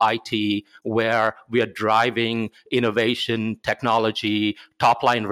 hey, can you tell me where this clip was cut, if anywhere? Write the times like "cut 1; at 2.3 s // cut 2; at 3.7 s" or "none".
none